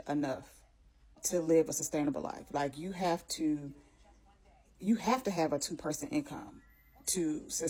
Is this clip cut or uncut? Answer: uncut